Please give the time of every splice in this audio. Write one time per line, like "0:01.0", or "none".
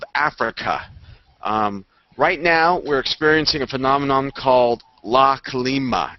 0:03.0